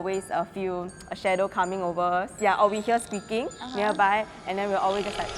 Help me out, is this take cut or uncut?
uncut